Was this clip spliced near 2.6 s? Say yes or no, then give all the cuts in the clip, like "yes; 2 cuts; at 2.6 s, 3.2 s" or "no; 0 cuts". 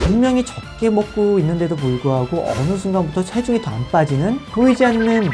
no; 0 cuts